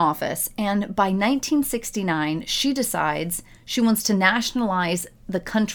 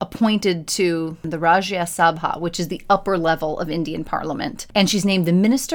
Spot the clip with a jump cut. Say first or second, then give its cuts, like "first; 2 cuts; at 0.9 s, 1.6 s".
second; 2 cuts; at 1.2 s, 4.6 s